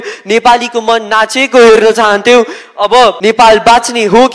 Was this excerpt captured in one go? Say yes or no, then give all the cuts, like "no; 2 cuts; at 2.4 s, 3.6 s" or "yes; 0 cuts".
no; 1 cut; at 3.2 s